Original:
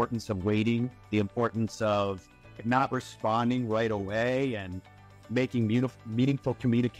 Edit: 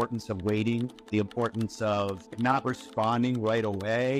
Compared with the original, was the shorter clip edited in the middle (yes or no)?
yes